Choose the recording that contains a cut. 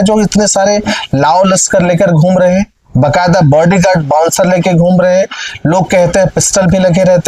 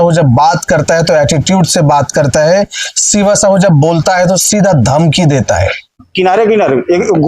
second; 1 cut; at 6.0 s

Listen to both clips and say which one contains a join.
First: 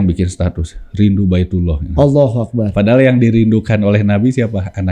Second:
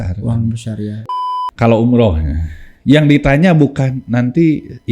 second; 1 cut; at 1.0 s

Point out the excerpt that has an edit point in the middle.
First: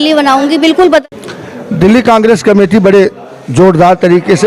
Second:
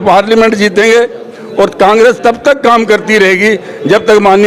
first; 1 cut; at 1.0 s

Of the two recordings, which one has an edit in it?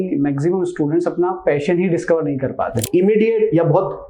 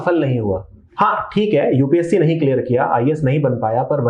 first; 1 cut; at 2.9 s

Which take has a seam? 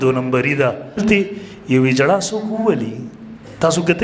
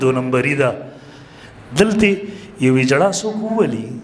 first; 1 cut; at 1.0 s

